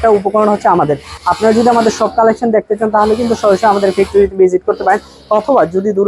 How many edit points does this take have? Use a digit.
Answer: 1